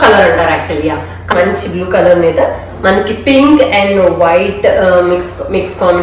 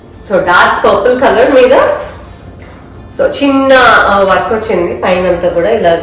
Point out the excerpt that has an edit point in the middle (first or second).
first